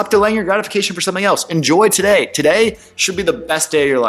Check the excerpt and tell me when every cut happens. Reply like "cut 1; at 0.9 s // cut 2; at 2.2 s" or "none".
none